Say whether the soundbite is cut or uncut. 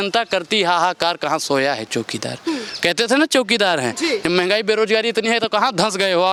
uncut